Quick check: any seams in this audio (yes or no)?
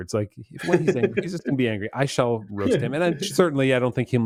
no